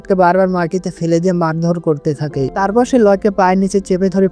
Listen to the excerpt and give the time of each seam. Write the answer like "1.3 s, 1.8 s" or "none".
none